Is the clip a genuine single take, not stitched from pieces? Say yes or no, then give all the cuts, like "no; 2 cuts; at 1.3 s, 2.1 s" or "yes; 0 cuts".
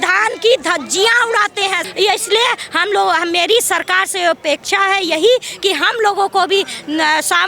no; 1 cut; at 1.8 s